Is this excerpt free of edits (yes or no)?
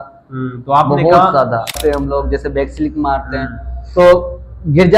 no